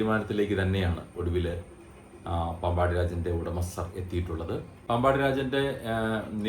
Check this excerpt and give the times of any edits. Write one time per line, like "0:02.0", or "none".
0:04.8